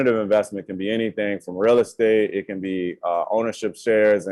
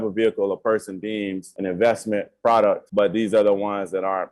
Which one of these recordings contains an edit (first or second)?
second